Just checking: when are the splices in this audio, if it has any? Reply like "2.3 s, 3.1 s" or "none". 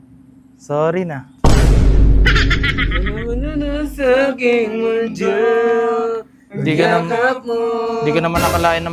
none